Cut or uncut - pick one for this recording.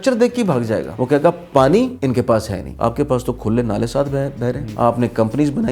cut